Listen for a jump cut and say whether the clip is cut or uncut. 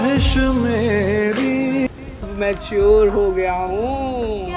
cut